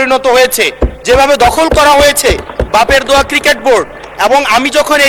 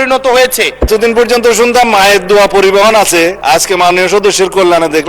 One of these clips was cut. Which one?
second; 2 cuts; at 0.9 s, 3.4 s

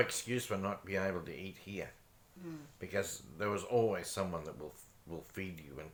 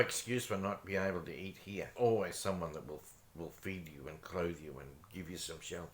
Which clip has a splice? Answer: second; 1 cut; at 1.9 s

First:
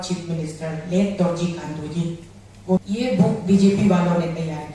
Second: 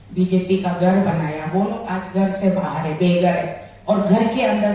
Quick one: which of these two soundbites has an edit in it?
first; 1 cut; at 2.8 s

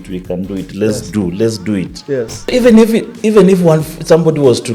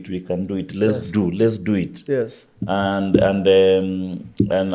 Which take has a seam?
first; 1 cut; at 2.5 s

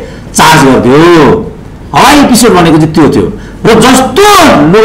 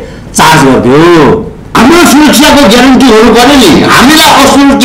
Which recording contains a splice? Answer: second; 1 cut; at 1.6 s

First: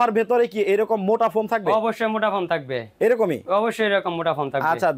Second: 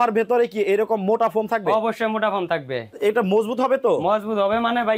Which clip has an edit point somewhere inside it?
second; 1 cut; at 2.9 s

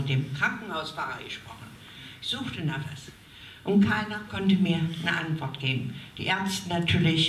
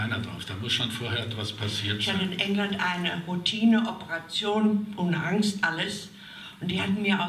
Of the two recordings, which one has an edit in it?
second; 1 cut; at 2.0 s

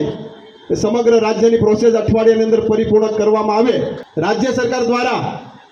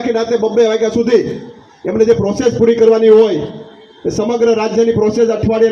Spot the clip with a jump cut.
first; 1 cut; at 4.0 s

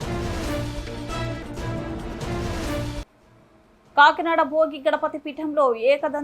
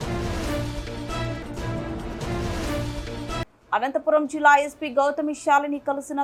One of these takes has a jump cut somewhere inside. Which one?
first; 1 cut; at 3.0 s

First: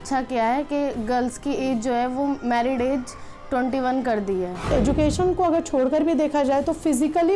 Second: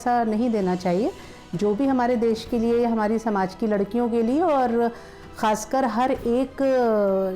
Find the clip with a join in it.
first; 1 cut; at 4.7 s

